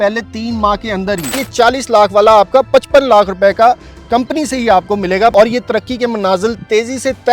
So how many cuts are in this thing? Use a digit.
2